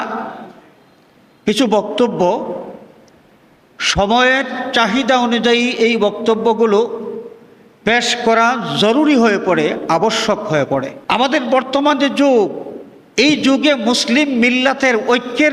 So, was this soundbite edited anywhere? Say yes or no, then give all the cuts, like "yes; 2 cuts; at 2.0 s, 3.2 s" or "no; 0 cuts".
yes; 1 cut; at 10.9 s